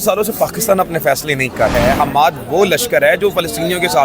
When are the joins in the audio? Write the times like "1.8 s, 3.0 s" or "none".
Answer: 1.7 s

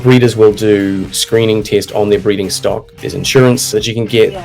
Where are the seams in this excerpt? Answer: 2.9 s

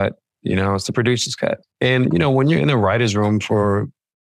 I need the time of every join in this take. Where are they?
1.7 s

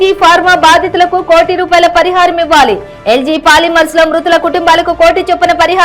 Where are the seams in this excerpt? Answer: none

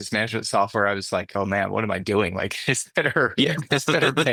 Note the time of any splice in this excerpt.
none

